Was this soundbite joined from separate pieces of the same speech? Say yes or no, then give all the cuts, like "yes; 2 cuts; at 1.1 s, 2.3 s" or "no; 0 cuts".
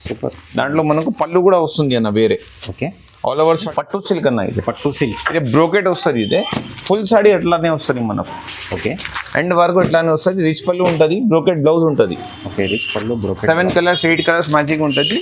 yes; 1 cut; at 3.7 s